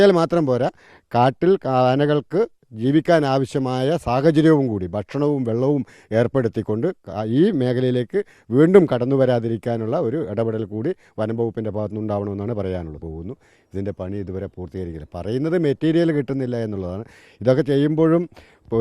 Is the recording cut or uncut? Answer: cut